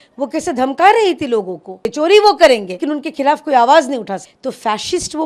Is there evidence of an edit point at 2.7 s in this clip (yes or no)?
yes